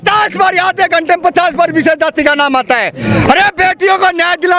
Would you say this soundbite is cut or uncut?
uncut